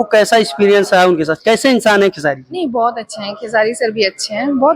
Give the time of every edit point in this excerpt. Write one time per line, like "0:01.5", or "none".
none